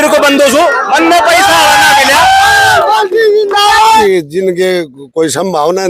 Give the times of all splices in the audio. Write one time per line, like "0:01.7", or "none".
0:04.0